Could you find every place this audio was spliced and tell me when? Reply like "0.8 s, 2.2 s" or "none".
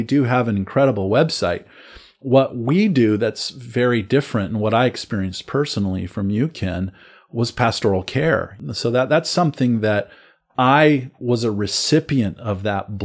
8.5 s

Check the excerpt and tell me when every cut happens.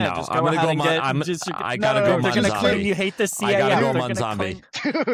none

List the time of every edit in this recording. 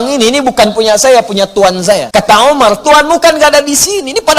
2.0 s

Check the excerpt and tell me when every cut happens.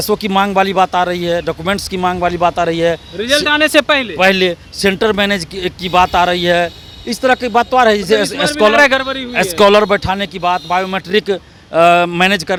none

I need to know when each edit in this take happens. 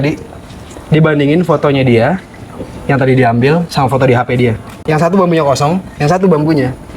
4.7 s

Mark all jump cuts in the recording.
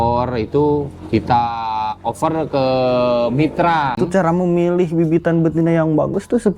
4.0 s

